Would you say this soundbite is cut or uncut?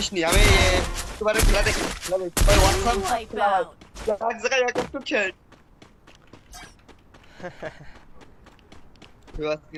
uncut